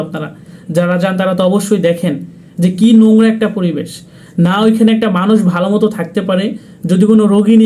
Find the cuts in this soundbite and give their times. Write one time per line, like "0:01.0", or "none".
none